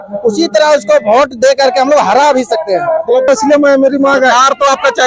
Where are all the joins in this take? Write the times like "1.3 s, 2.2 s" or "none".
3.3 s

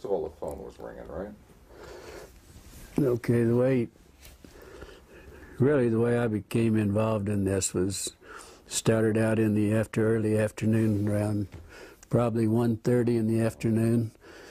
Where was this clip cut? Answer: none

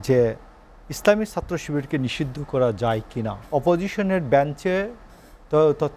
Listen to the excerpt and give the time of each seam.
3.4 s

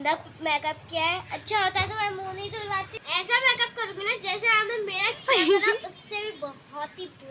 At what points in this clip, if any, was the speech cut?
3.0 s

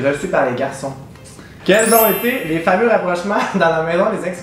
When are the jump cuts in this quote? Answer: 1.5 s

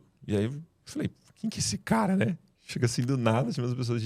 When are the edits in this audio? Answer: none

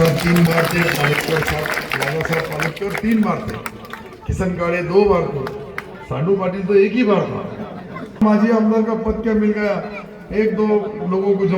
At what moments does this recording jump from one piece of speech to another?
8.2 s

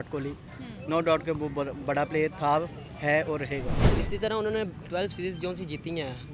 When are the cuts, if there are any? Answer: 3.8 s

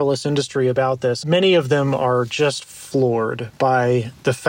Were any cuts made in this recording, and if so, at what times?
1.2 s

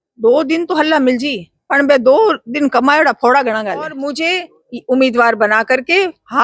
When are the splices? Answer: 4.1 s

